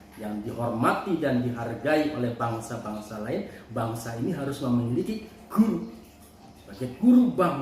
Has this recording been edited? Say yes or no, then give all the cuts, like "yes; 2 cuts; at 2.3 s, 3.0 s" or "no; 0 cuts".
no; 0 cuts